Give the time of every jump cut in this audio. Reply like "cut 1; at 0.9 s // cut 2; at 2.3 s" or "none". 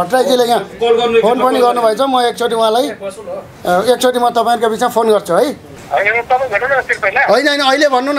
cut 1; at 5.7 s